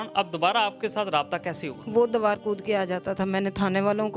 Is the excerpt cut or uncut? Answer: uncut